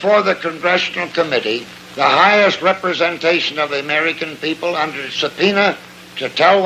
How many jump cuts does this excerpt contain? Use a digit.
0